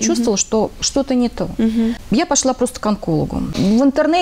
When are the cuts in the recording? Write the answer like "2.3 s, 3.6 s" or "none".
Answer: 2.0 s, 3.5 s